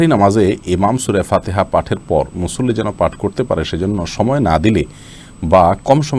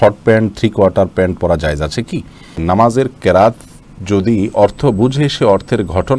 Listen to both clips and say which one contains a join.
second; 1 cut; at 2.6 s

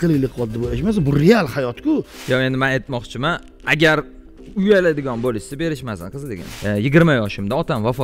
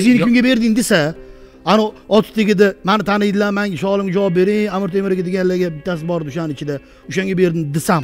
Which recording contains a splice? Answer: first; 2 cuts; at 2.1 s, 6.5 s

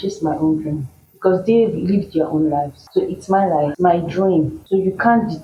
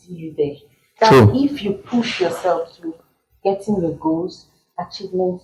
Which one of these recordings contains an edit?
first; 3 cuts; at 2.8 s, 3.7 s, 4.6 s

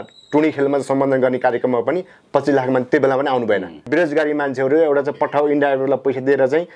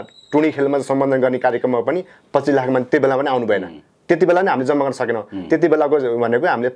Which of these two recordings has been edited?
first; 1 cut; at 3.8 s

